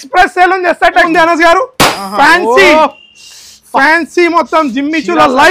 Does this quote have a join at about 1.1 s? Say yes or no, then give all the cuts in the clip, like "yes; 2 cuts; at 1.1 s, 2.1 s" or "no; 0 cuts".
yes; 1 cut; at 1.1 s